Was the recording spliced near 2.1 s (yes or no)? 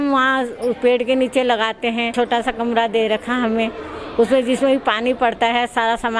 yes